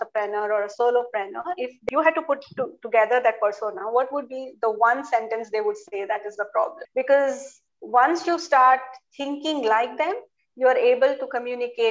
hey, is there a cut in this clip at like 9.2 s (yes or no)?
no